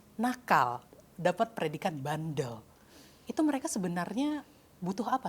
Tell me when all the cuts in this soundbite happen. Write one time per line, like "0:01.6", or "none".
none